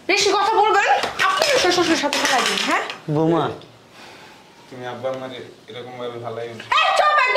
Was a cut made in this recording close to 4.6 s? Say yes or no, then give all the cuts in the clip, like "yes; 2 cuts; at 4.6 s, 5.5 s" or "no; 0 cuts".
no; 0 cuts